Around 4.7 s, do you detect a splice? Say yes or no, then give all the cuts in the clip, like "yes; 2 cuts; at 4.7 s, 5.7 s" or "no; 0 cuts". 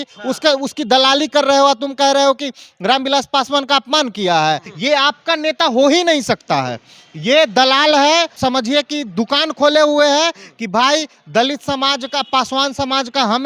yes; 2 cuts; at 4.7 s, 8.4 s